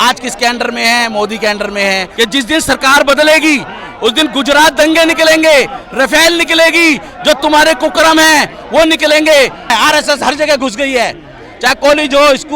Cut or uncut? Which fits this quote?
cut